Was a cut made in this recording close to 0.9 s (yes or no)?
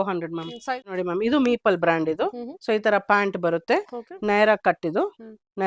yes